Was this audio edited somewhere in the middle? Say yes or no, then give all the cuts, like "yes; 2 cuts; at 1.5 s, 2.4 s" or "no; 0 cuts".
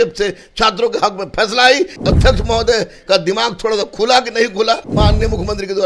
yes; 2 cuts; at 1.9 s, 4.9 s